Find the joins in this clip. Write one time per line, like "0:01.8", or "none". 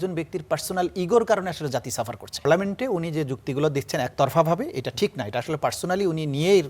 0:02.5